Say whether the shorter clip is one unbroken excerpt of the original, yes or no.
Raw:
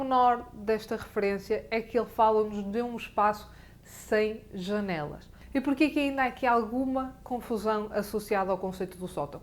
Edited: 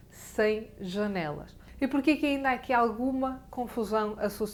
yes